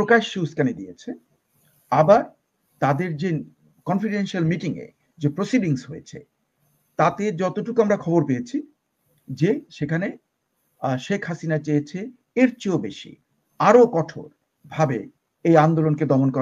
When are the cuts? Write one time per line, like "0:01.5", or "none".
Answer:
none